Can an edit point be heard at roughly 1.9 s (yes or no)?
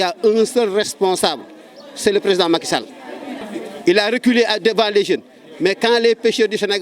no